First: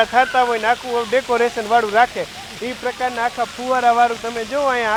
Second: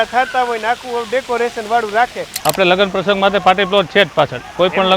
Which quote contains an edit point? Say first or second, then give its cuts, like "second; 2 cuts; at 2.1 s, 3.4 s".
second; 1 cut; at 2.3 s